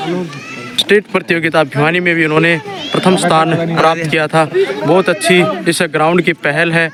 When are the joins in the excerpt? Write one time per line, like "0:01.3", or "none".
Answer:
none